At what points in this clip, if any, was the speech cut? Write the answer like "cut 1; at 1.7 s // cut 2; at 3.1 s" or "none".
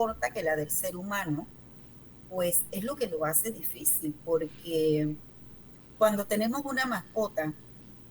none